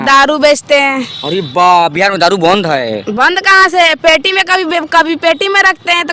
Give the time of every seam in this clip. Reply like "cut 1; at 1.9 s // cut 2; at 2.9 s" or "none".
none